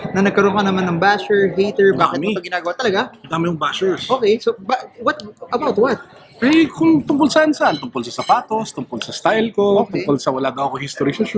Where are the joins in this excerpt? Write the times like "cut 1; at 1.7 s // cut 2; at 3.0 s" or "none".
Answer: none